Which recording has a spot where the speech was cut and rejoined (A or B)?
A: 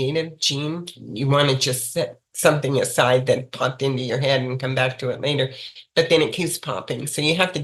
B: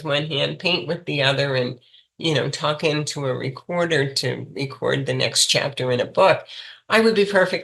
A